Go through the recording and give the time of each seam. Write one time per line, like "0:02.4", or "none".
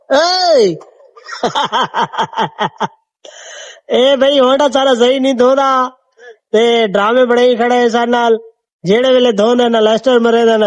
none